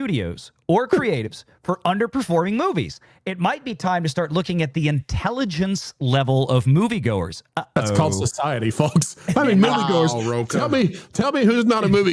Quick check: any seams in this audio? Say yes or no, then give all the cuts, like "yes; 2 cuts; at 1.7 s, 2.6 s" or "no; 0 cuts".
no; 0 cuts